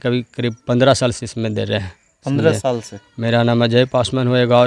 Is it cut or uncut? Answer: uncut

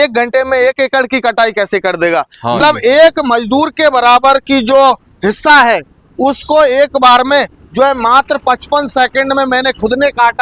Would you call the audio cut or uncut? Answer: cut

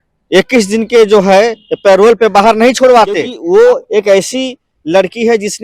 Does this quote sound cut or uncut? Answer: cut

